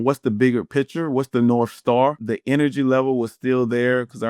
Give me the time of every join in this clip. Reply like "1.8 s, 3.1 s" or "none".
2.2 s

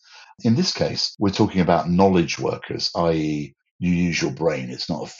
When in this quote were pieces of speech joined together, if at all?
1.0 s

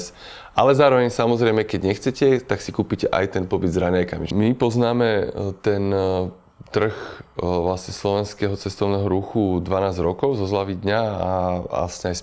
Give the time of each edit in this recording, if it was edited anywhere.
4.3 s

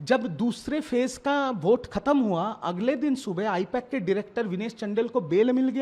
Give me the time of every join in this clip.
none

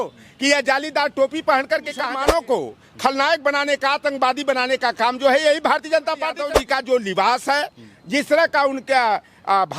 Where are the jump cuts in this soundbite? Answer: 2.1 s, 6.4 s

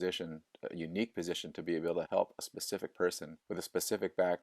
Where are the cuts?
2.1 s, 3.3 s

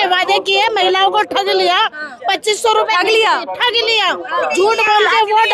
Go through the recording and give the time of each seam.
none

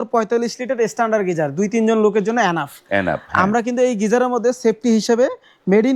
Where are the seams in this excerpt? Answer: none

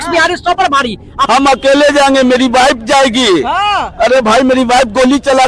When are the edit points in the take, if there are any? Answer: 1.1 s

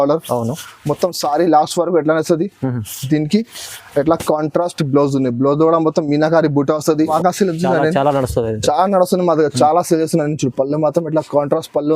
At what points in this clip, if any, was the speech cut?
7.1 s

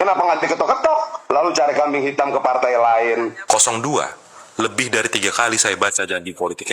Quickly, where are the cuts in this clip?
3.4 s

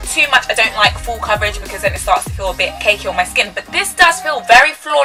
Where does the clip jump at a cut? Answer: none

